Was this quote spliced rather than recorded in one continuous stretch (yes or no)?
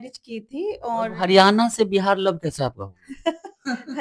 no